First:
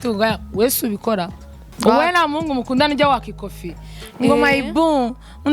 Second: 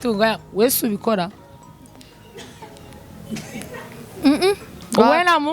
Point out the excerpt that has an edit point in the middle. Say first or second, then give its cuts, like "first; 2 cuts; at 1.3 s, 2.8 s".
first; 1 cut; at 1.6 s